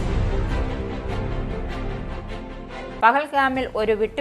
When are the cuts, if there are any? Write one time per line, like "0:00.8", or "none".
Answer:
0:03.0